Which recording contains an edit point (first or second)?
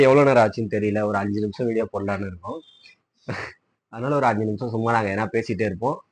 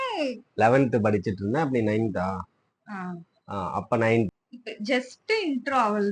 second